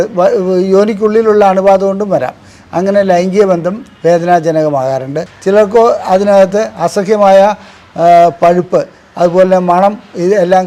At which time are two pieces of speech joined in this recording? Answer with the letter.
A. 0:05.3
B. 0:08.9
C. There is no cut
A